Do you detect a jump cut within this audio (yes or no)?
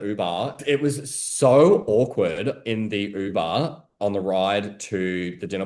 no